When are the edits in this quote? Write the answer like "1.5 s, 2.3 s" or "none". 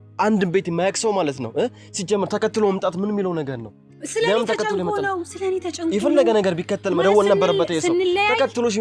none